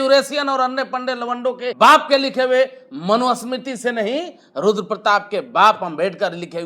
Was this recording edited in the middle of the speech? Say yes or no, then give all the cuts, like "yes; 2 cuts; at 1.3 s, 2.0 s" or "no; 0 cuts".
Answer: yes; 1 cut; at 1.7 s